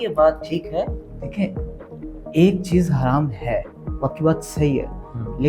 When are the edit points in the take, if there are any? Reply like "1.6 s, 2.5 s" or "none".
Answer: none